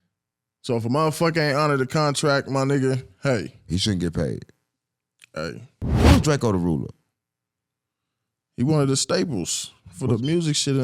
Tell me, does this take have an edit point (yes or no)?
yes